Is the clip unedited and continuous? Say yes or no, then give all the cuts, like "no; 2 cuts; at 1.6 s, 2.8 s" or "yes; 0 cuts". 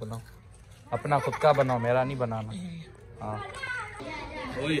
yes; 0 cuts